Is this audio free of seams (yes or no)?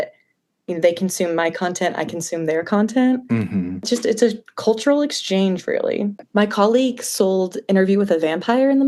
no